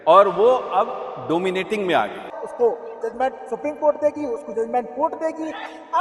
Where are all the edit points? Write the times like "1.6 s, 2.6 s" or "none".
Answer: 2.4 s

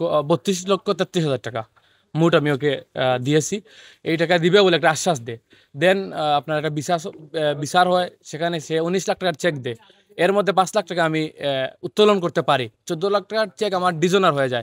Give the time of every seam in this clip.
none

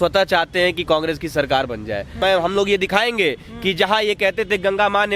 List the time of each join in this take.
2.2 s

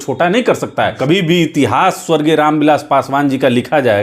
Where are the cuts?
1.0 s

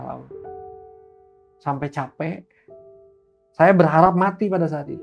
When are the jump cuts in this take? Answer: none

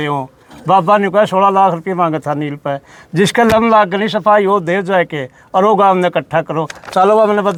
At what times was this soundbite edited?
none

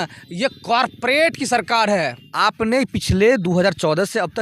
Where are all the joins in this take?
2.2 s

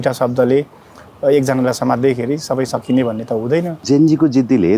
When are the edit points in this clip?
3.8 s

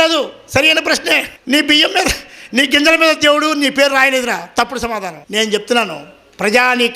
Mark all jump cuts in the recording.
1.3 s, 5.2 s

